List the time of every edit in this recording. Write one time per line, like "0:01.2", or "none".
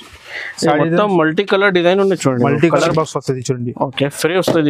0:02.9